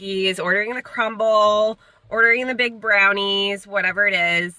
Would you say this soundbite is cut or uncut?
uncut